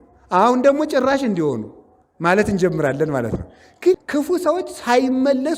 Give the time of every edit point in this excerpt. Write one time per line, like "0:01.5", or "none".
0:04.0